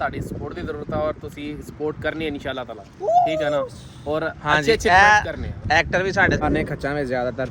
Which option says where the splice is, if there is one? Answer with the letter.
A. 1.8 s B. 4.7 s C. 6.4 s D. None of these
C